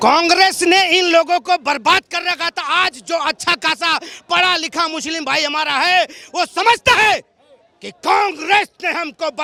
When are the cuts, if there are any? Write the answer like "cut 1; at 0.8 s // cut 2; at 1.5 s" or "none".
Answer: none